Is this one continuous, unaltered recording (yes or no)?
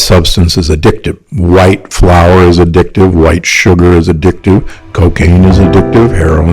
no